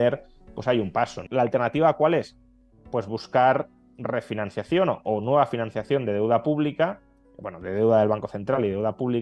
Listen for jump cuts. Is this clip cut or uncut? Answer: cut